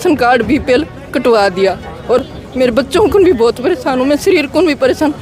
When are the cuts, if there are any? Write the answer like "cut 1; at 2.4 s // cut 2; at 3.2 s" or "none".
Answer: cut 1; at 2.2 s